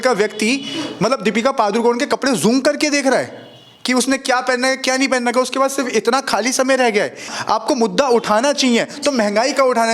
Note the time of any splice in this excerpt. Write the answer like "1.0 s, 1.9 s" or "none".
7.3 s